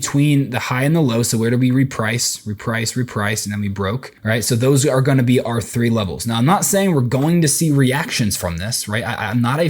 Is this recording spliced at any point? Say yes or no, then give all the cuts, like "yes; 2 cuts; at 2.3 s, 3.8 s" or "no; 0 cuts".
yes; 1 cut; at 4.1 s